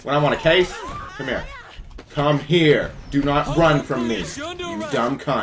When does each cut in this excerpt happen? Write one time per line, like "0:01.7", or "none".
0:01.0